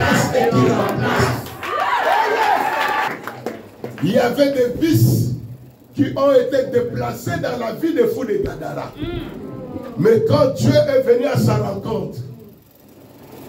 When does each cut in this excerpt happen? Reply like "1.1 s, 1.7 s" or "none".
3.1 s